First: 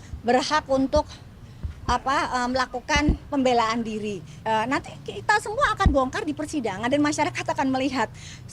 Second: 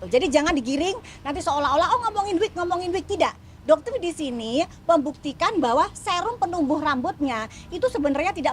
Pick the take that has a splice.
first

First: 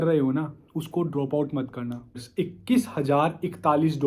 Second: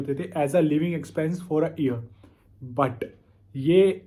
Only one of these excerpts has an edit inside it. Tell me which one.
first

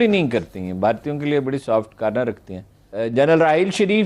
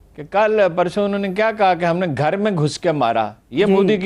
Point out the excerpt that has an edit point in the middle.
first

